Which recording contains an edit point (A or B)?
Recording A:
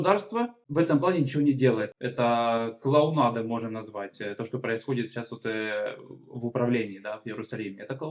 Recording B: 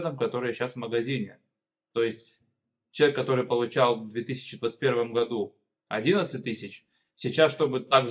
A